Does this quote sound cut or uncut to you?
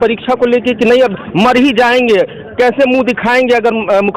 uncut